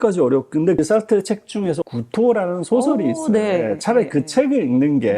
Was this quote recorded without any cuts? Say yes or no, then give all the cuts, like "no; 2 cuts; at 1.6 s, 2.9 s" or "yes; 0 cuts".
no; 1 cut; at 1.8 s